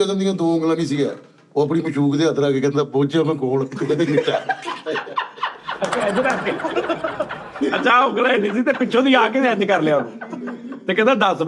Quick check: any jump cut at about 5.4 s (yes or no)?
no